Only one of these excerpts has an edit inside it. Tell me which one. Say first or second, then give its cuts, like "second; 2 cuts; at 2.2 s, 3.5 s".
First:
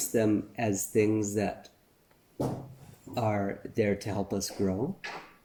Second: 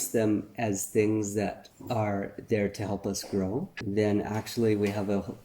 second; 2 cuts; at 1.7 s, 3.7 s